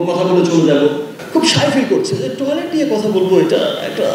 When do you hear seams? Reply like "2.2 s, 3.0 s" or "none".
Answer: 1.1 s